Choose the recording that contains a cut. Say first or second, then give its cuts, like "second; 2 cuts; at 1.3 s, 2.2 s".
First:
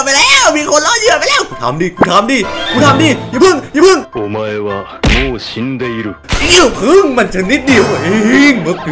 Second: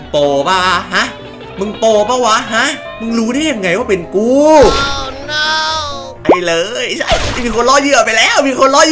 second; 1 cut; at 6.2 s